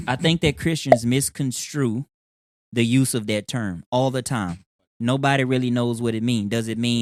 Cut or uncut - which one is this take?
uncut